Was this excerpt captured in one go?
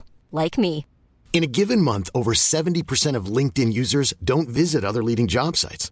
yes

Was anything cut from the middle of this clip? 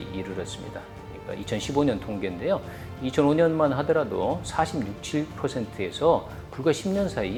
no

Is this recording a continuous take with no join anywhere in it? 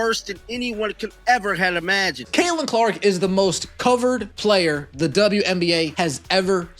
no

